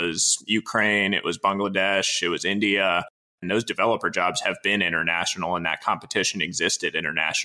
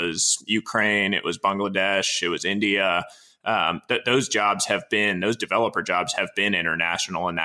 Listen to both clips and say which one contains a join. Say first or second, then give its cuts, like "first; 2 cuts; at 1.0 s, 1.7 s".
first; 1 cut; at 3.4 s